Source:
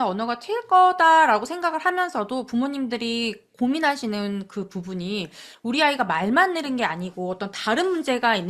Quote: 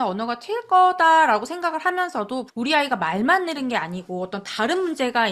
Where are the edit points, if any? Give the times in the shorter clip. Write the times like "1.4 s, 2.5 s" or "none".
2.5 s